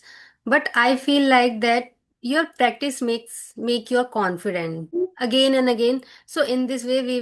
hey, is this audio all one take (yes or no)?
no